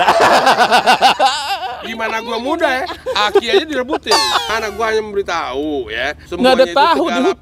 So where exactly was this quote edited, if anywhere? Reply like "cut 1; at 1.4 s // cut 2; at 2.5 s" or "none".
cut 1; at 4.4 s // cut 2; at 6.2 s